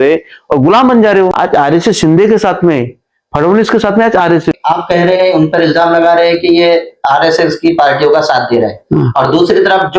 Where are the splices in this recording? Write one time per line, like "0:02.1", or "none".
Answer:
0:01.3
0:04.6